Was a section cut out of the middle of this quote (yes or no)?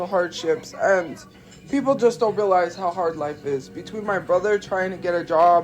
no